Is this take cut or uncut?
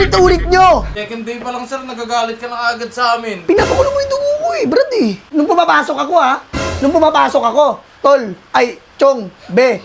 cut